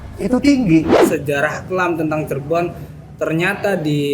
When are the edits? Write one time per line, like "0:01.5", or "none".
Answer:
0:01.0